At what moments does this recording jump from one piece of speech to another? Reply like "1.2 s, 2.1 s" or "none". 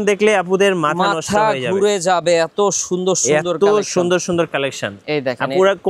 none